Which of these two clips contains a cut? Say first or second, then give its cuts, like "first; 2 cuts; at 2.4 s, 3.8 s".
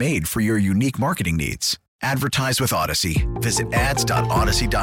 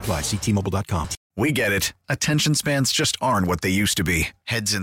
second; 1 cut; at 1.2 s